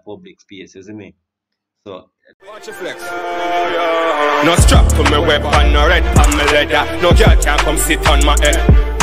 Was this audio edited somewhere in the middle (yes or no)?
yes